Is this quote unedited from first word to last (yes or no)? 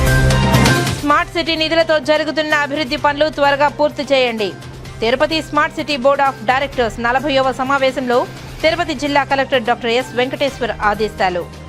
no